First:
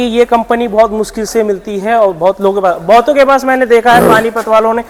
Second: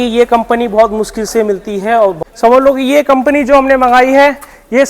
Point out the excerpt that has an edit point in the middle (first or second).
second